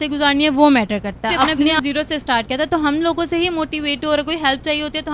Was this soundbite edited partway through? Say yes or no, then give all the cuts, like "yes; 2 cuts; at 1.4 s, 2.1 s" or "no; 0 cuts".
yes; 1 cut; at 1.8 s